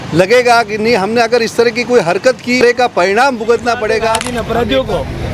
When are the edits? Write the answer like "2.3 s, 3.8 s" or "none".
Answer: 2.6 s, 4.3 s